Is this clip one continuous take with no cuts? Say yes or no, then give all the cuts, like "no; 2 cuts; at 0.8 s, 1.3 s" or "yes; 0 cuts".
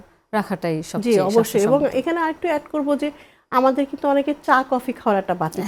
yes; 0 cuts